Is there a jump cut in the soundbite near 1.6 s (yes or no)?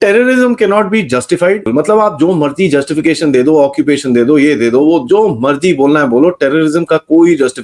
yes